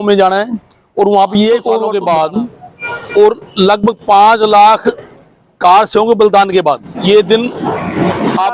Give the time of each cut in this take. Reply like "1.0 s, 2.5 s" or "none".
1.9 s, 6.9 s

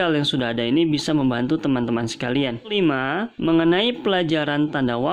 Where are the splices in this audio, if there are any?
2.7 s

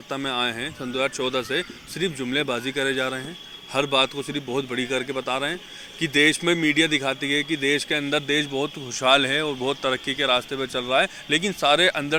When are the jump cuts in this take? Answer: none

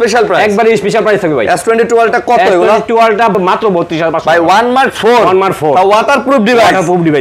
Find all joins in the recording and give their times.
3.3 s

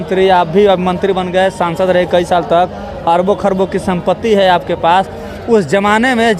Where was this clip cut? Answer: none

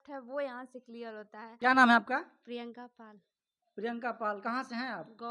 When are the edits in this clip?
1.4 s

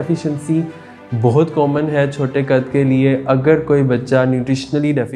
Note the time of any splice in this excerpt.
none

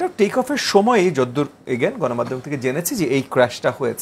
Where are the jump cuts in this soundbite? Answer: none

